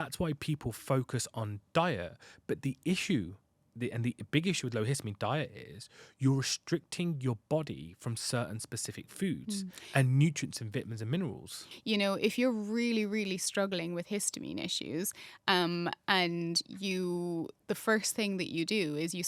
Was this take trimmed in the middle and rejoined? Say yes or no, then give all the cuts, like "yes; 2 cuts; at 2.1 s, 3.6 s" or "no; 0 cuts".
yes; 1 cut; at 11.7 s